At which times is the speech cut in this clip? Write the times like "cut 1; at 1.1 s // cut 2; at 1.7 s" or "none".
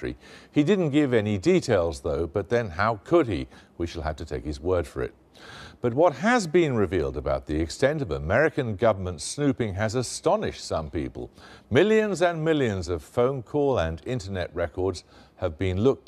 cut 1; at 10.9 s